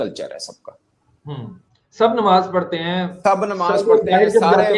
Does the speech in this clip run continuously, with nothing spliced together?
yes; 0 cuts

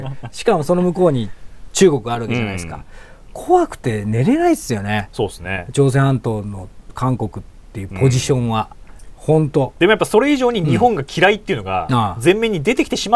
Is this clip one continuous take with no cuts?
yes; 0 cuts

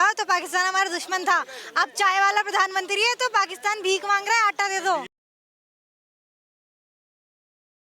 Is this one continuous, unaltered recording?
yes; 0 cuts

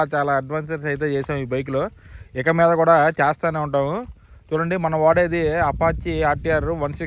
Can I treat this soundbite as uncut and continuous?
yes; 0 cuts

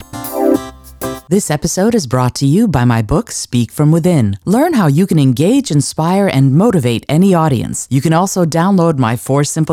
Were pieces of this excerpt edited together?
no; 0 cuts

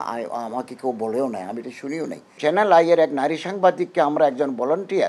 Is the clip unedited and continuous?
no; 1 cut; at 2.4 s

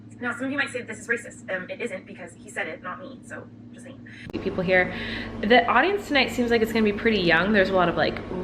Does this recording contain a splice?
yes; 1 cut; at 4.1 s

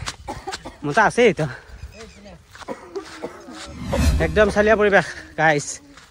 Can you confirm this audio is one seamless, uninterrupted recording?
no; 1 cut; at 3.7 s

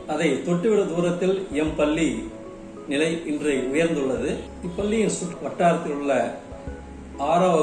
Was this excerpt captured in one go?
no; 2 cuts; at 4.6 s, 5.4 s

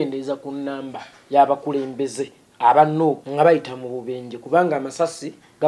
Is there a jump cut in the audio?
yes; 1 cut; at 3.2 s

